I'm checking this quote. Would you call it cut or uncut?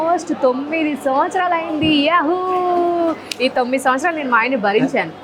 uncut